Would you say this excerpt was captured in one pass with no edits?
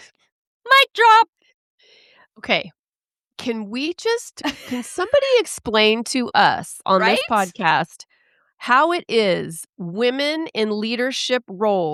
yes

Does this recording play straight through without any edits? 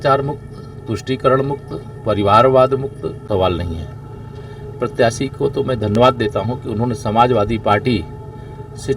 no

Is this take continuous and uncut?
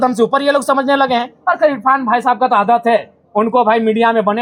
yes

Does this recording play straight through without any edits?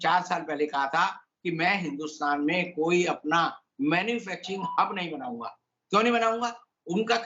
yes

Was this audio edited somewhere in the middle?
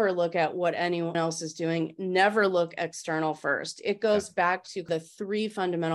yes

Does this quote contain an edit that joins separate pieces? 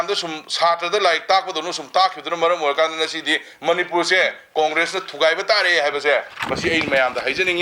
no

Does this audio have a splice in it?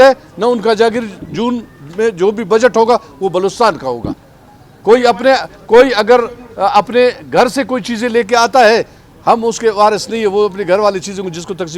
no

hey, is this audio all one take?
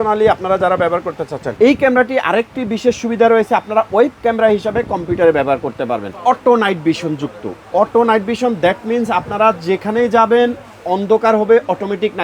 no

